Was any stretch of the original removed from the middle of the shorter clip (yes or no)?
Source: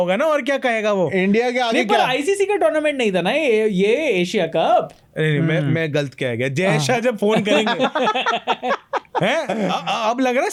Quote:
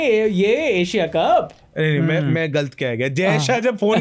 no